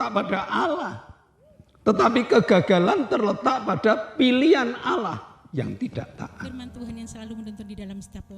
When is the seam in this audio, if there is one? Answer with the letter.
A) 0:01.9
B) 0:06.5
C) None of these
B